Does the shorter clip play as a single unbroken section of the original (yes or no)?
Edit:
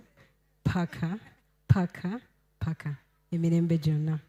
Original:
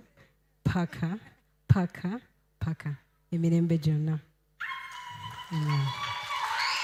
yes